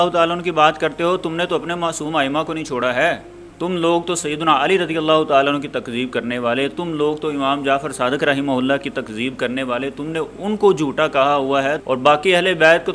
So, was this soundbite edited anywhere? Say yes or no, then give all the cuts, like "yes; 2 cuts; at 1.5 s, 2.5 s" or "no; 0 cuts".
no; 0 cuts